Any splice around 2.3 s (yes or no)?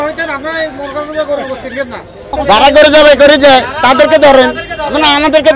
yes